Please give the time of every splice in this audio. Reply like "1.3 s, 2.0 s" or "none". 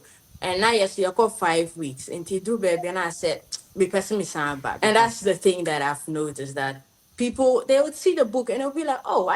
4.8 s